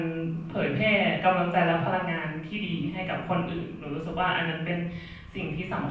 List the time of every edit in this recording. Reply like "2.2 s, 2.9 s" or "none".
none